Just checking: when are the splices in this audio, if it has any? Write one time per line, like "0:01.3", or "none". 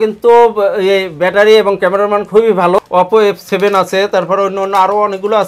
0:02.8